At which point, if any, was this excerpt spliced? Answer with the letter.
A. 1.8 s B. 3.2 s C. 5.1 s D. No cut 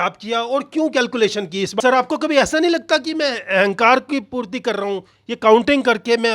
A